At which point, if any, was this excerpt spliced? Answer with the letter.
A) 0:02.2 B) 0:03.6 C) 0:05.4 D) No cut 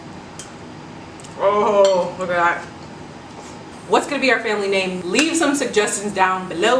B